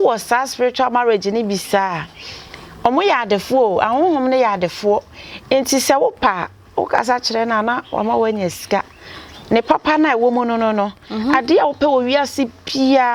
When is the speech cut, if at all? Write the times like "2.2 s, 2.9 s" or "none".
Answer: none